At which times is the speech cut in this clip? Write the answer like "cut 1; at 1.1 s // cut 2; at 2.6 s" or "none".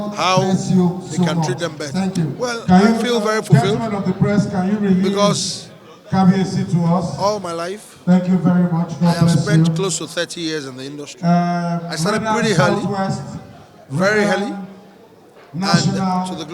cut 1; at 2.3 s